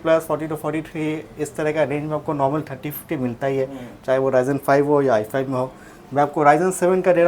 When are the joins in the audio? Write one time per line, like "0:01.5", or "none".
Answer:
none